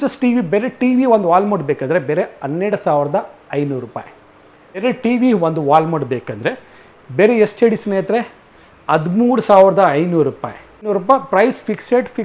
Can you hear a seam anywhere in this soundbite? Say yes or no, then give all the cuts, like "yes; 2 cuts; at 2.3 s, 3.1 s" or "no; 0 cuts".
yes; 2 cuts; at 4.8 s, 10.9 s